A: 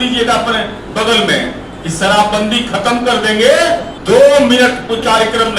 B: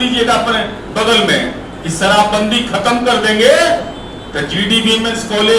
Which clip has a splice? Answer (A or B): A